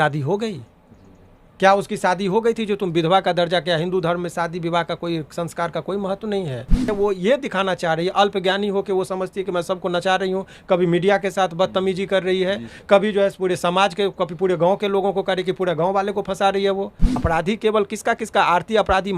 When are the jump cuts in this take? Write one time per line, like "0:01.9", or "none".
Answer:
0:06.9
0:17.1